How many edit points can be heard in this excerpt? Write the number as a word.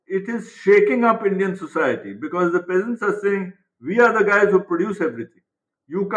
zero